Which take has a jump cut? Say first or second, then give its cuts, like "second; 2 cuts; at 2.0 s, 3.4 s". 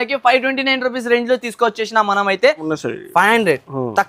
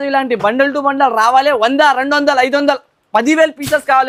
first; 1 cut; at 2.7 s